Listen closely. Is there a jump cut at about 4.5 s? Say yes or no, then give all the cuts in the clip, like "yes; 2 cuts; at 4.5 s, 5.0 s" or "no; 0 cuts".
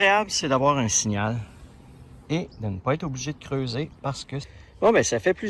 yes; 1 cut; at 4.5 s